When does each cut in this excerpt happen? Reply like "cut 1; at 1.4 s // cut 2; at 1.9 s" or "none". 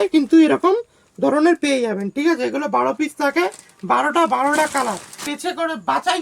cut 1; at 5.3 s